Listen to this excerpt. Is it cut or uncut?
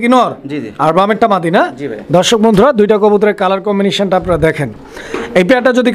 uncut